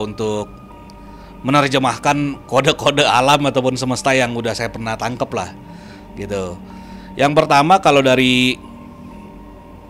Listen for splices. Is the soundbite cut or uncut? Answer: uncut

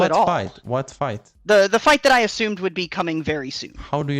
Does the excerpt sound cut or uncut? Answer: cut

